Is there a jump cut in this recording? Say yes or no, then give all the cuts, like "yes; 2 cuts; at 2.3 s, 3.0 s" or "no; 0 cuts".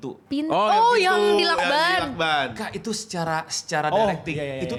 no; 0 cuts